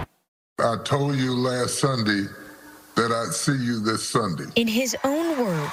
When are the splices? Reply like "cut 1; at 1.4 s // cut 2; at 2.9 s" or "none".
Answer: none